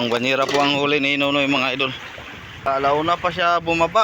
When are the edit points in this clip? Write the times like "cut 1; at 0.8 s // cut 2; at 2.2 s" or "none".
cut 1; at 2.7 s